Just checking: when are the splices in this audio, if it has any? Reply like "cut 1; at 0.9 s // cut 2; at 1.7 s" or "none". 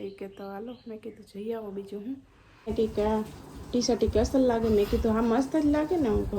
cut 1; at 2.7 s